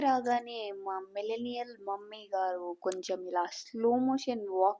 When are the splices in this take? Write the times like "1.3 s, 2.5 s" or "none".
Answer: none